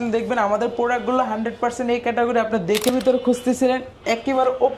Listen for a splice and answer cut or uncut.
cut